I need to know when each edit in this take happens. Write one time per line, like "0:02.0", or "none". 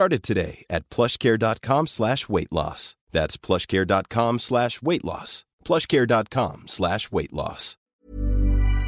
0:07.9